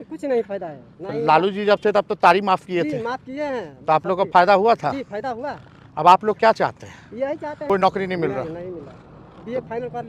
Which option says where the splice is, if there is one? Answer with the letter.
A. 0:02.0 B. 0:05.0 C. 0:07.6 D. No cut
C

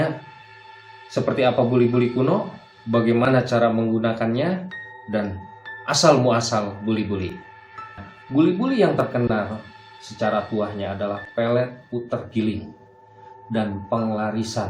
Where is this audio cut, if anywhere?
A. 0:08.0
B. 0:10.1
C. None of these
A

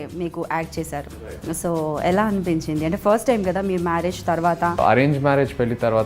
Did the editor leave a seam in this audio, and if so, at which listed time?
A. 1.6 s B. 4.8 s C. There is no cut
B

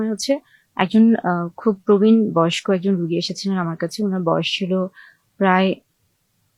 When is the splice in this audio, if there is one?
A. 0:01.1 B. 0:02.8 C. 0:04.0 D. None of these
D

